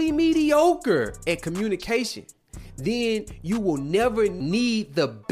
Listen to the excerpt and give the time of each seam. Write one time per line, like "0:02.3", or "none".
0:04.4